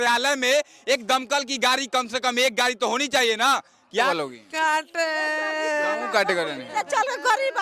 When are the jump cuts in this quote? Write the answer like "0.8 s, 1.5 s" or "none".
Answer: 4.1 s